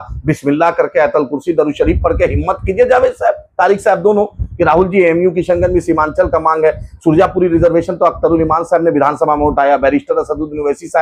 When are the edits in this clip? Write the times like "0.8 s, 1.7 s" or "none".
none

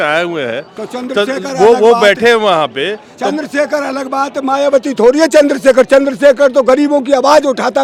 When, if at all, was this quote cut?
none

